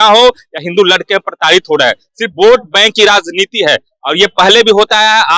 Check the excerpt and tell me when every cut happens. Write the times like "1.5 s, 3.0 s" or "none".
none